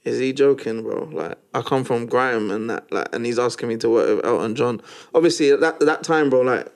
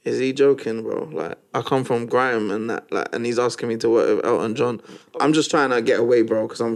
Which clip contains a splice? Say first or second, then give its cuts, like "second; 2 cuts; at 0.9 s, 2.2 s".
second; 1 cut; at 4.9 s